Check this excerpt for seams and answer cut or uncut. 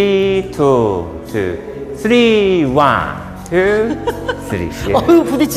uncut